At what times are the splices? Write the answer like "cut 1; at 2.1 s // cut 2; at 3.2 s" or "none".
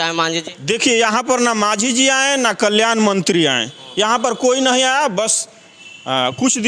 none